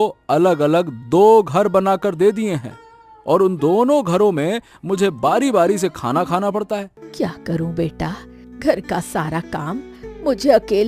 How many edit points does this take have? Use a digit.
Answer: 1